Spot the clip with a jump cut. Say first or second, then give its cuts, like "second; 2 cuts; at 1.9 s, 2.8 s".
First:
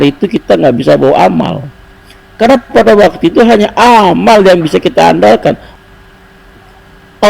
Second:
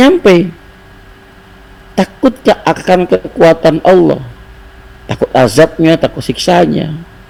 first; 1 cut; at 5.7 s